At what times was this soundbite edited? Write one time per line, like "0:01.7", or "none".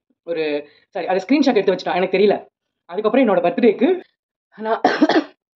0:04.0